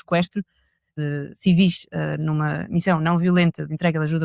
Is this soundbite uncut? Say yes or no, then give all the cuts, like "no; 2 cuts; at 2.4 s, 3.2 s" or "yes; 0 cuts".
no; 1 cut; at 0.9 s